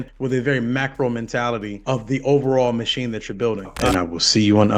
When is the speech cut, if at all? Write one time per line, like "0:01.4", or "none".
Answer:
0:03.7